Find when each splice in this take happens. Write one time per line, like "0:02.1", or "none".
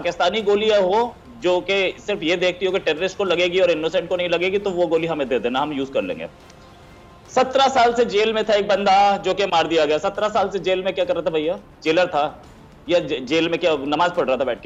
none